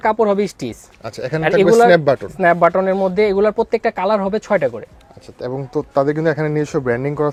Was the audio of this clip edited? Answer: no; 0 cuts

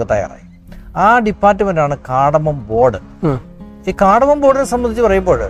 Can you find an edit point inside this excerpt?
no; 0 cuts

